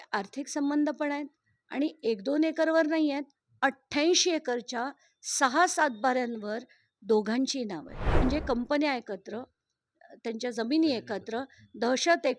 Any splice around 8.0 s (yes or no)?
yes